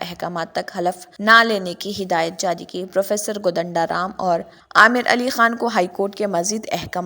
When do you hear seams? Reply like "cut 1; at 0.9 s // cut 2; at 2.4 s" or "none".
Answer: cut 1; at 1.1 s // cut 2; at 4.6 s